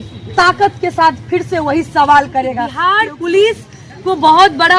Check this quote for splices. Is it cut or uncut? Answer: cut